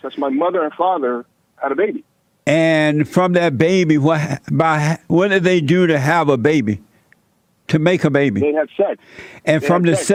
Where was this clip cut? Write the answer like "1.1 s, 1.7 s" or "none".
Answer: none